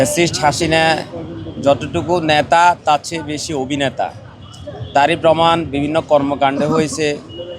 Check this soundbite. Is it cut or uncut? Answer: uncut